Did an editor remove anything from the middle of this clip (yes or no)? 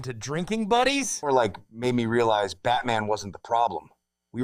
yes